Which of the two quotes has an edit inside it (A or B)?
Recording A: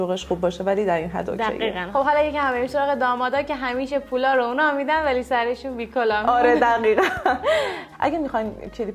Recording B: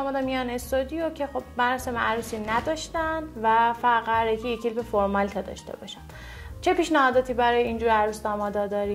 A